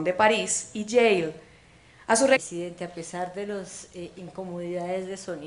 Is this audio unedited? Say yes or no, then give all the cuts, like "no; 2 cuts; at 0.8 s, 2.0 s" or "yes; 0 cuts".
yes; 0 cuts